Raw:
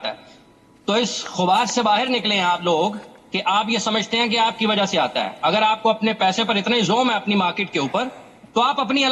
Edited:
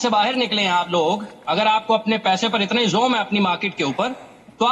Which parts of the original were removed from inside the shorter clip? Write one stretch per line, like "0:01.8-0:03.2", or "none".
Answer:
0:03.3-0:05.6